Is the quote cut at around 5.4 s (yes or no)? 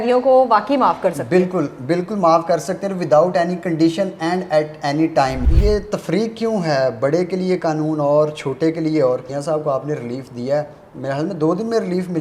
yes